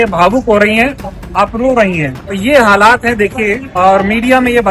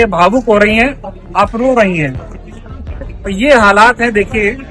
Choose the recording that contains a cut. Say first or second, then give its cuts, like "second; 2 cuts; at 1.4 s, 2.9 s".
first; 2 cuts; at 2.2 s, 3.7 s